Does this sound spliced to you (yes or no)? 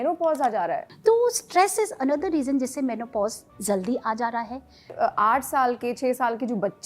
yes